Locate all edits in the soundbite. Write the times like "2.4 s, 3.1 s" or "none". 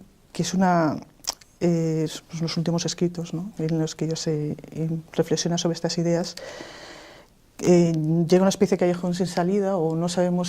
9.5 s